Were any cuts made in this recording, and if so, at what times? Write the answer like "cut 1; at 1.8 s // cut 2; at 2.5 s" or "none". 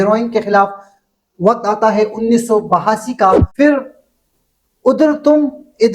cut 1; at 3.5 s